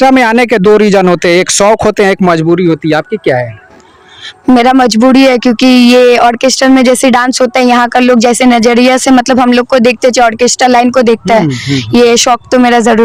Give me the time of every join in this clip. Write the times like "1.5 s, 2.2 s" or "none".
none

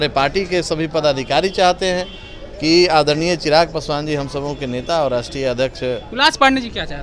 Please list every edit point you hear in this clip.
none

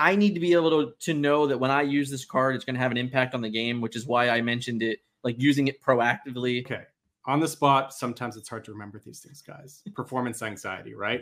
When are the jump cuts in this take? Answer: 6.8 s

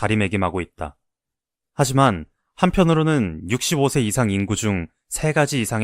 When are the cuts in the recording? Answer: 1.8 s

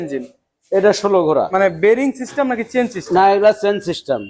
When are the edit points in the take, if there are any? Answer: 1.5 s

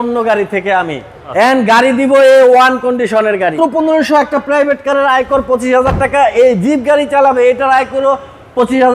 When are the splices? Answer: 3.5 s

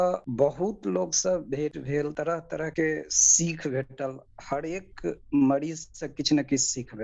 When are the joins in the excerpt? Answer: none

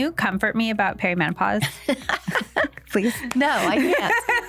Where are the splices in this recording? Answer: none

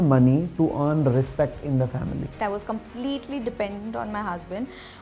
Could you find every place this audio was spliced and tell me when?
2.3 s

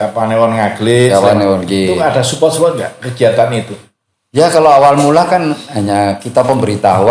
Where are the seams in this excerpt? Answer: none

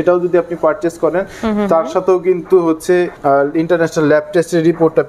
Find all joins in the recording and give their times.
3.1 s

